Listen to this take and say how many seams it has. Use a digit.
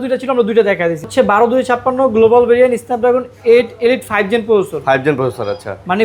1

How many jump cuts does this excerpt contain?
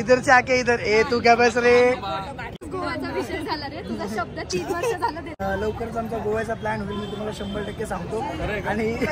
2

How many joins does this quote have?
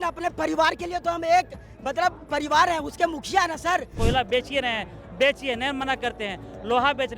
1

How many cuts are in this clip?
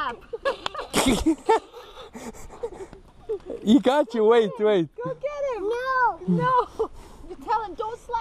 0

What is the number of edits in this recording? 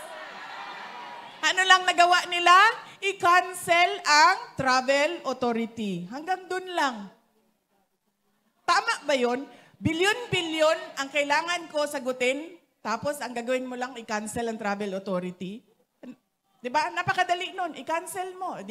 0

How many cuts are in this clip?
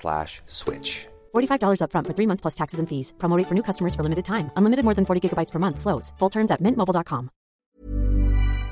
1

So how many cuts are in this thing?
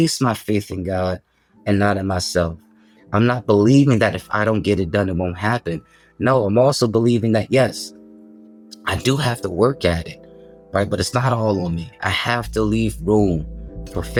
0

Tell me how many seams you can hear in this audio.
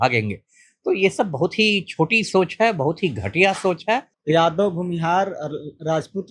1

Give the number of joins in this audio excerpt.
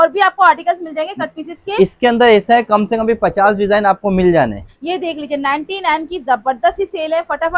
1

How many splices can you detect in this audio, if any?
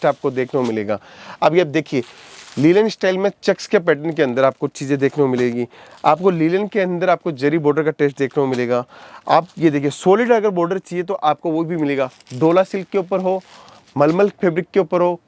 0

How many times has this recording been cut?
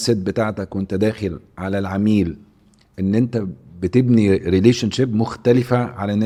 0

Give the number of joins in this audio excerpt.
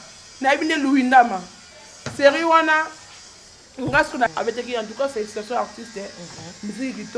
1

